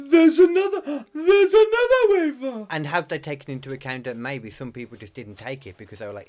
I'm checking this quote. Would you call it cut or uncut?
uncut